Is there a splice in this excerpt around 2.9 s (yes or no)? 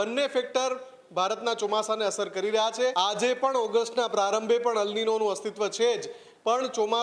yes